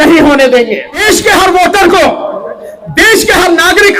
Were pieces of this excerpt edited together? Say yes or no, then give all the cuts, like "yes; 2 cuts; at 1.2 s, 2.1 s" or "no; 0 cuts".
yes; 1 cut; at 1.0 s